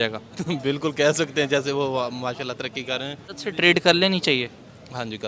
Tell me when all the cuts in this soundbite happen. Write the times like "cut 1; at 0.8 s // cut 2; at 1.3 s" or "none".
cut 1; at 3.3 s